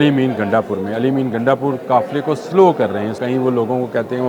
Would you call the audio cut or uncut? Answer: cut